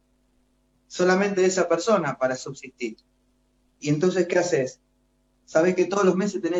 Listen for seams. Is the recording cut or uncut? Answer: uncut